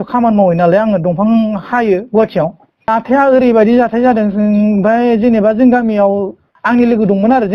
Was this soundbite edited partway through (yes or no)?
yes